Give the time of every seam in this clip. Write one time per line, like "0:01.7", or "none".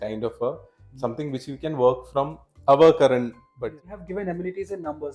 0:04.0